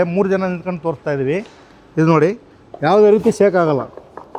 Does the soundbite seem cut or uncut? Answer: uncut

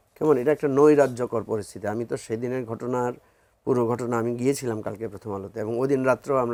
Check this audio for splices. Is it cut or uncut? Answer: uncut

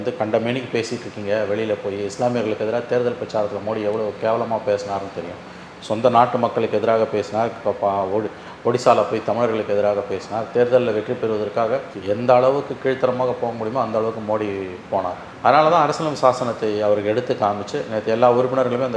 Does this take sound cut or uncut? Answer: uncut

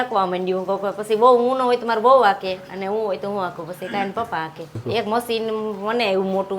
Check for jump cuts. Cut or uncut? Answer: cut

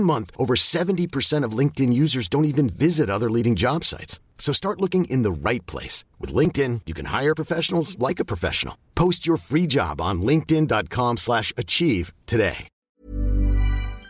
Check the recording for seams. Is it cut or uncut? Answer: cut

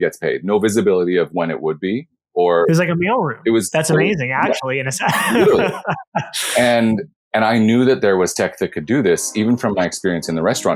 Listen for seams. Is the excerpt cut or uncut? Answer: uncut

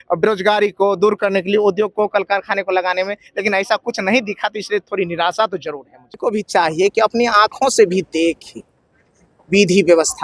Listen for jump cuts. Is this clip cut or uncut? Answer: cut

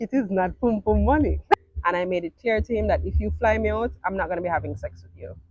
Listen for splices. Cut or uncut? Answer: cut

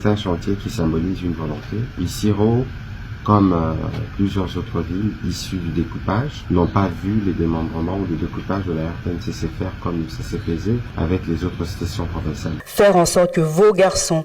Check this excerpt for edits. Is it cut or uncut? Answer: cut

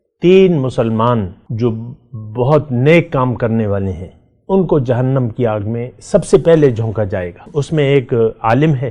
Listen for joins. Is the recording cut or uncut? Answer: cut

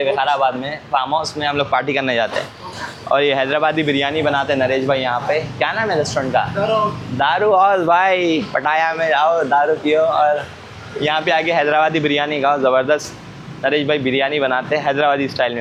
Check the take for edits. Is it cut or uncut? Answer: uncut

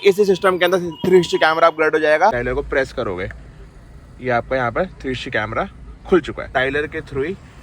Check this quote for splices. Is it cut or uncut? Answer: cut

